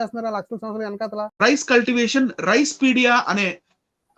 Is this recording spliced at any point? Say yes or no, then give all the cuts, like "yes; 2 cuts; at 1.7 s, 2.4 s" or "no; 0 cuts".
yes; 1 cut; at 1.3 s